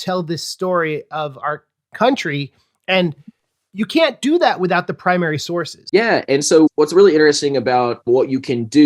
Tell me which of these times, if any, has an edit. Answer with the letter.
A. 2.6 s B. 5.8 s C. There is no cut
B